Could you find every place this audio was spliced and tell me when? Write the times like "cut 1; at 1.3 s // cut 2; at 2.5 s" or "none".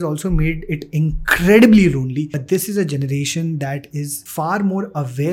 cut 1; at 2.4 s // cut 2; at 4.2 s